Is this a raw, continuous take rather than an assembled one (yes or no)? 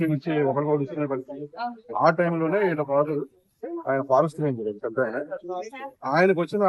yes